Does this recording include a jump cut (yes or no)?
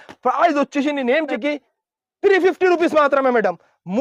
yes